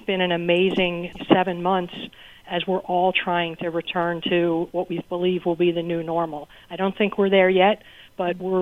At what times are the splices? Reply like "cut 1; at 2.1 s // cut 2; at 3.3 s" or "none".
cut 1; at 1.1 s

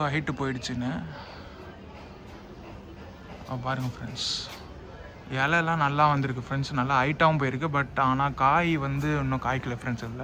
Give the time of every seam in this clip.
none

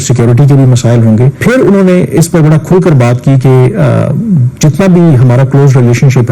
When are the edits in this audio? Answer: cut 1; at 1.4 s

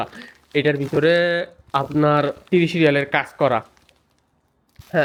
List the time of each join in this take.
none

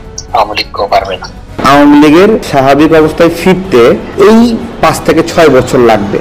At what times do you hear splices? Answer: cut 1; at 1.5 s

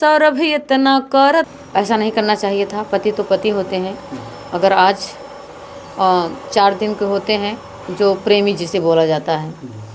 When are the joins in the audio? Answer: cut 1; at 1.5 s

